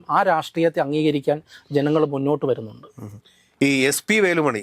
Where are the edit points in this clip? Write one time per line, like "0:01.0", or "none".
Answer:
none